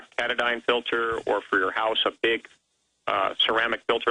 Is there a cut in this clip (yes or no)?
no